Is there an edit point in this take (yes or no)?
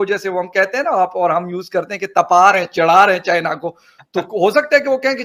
no